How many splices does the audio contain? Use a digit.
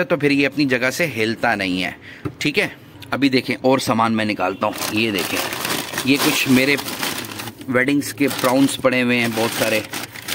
0